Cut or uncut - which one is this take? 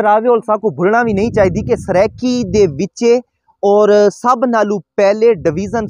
uncut